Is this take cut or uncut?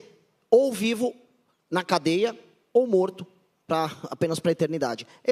uncut